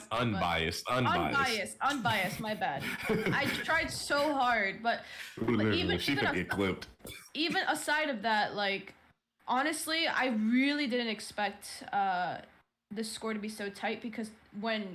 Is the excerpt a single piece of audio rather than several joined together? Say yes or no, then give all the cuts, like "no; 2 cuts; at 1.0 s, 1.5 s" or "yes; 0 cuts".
yes; 0 cuts